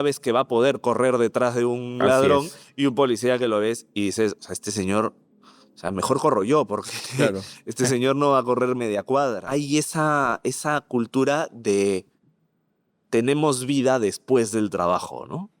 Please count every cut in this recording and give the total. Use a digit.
1